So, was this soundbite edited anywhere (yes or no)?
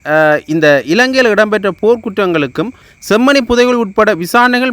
yes